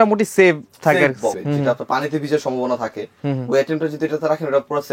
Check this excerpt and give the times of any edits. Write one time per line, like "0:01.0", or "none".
0:01.3